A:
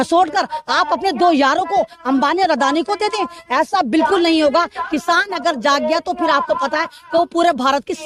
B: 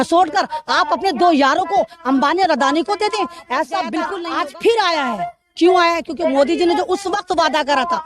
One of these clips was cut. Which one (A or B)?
B